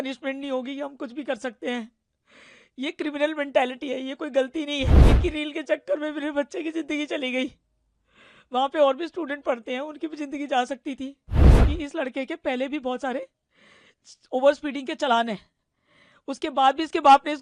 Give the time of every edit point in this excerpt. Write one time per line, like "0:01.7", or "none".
0:05.0
0:11.5